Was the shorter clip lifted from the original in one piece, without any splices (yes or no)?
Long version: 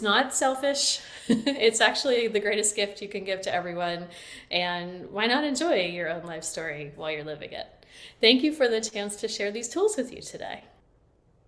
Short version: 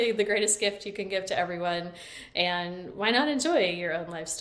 yes